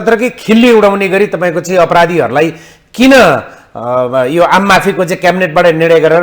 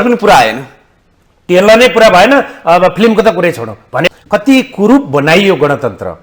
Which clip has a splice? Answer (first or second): second